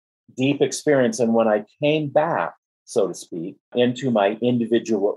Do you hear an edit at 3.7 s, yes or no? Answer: yes